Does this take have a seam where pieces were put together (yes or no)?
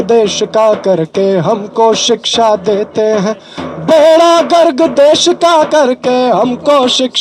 no